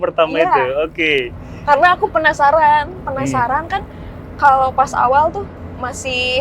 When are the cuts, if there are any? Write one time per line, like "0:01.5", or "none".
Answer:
none